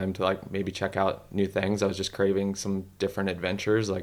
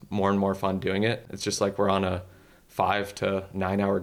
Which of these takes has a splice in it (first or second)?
second